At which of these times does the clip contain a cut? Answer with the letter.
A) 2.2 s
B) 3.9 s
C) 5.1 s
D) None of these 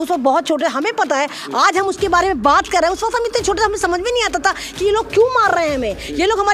D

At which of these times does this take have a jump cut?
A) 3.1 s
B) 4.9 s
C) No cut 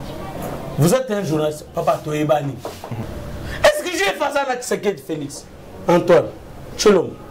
A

